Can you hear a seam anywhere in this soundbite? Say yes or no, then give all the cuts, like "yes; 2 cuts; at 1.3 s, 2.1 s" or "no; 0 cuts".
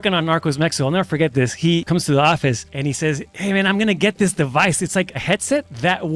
yes; 3 cuts; at 1.8 s, 3.1 s, 5.2 s